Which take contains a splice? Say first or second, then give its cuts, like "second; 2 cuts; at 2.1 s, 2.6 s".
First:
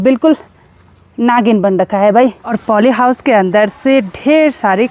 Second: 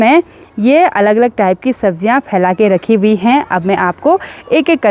first; 1 cut; at 2.5 s